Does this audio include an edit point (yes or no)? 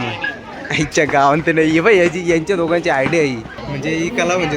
yes